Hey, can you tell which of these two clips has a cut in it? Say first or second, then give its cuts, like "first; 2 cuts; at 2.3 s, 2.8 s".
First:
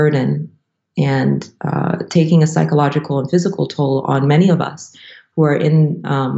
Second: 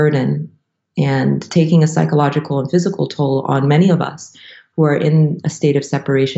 second; 2 cuts; at 1.5 s, 5.4 s